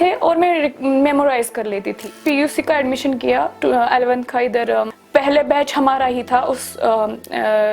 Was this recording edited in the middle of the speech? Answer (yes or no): yes